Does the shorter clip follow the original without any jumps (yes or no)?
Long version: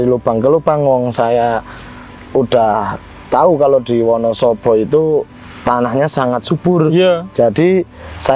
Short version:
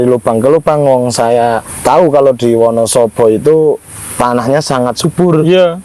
no